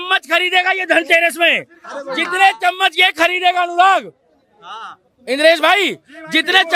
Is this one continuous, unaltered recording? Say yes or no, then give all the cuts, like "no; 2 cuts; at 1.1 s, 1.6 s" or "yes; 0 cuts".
yes; 0 cuts